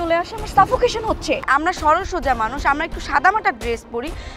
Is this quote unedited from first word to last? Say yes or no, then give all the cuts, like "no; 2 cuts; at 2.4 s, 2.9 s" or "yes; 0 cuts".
no; 1 cut; at 1.5 s